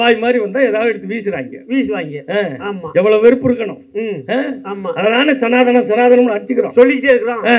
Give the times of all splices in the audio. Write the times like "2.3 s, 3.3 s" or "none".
none